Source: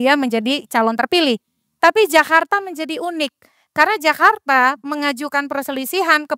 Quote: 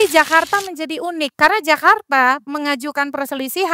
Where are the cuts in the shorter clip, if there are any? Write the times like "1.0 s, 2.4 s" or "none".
1.3 s